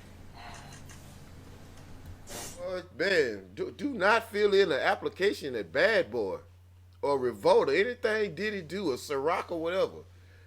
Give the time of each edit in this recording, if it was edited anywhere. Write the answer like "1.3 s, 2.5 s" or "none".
2.8 s